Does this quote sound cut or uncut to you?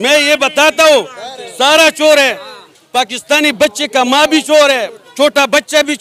uncut